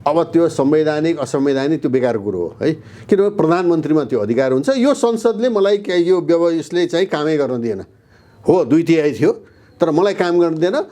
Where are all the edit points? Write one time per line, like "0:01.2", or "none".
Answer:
none